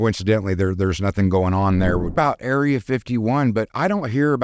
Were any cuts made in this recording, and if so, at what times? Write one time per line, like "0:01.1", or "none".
0:02.1